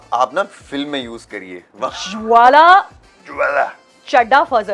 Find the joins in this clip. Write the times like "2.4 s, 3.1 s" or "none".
none